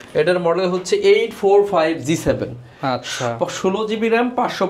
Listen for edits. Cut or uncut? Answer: uncut